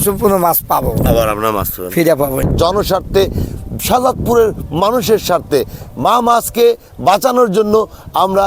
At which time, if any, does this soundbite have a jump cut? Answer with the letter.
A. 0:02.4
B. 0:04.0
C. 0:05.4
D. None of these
A